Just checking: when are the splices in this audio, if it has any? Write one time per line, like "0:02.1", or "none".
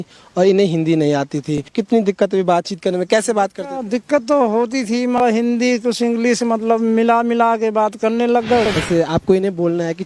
0:01.7
0:05.2
0:08.7